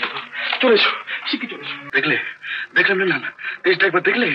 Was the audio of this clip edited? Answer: yes; 1 cut; at 1.8 s

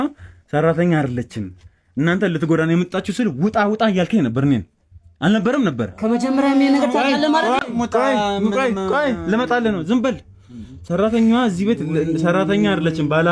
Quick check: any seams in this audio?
no; 0 cuts

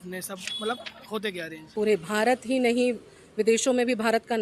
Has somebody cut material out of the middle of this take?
yes; 1 cut; at 1.6 s

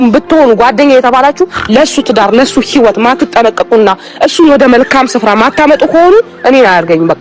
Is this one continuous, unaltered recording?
yes; 0 cuts

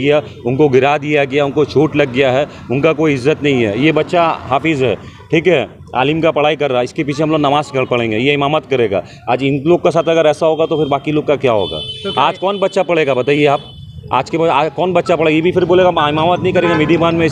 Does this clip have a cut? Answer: no; 0 cuts

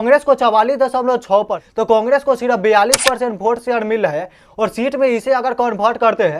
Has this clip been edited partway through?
yes; 1 cut; at 1.6 s

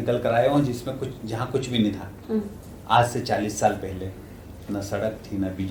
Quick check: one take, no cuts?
yes; 0 cuts

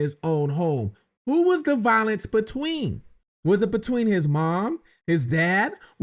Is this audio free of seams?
yes; 0 cuts

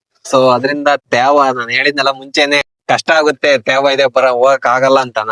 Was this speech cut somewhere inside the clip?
yes; 1 cut; at 2.7 s

